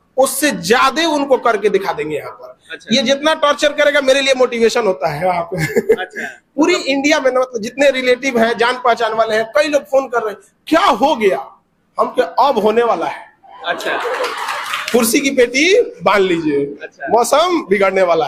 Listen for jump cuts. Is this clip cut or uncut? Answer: uncut